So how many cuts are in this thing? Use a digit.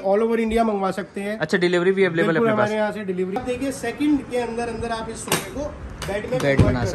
1